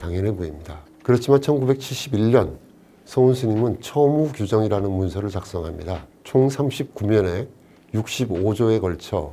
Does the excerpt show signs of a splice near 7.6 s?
no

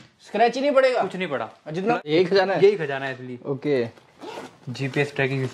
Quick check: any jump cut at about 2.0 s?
yes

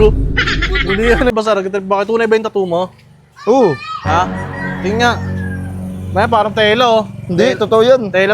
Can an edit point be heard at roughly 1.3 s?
yes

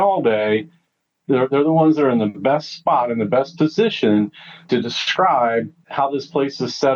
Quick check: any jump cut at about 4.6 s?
no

